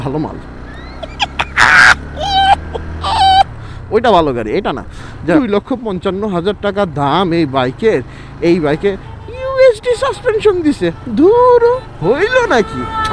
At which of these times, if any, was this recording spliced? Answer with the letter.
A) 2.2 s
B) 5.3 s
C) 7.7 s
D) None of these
B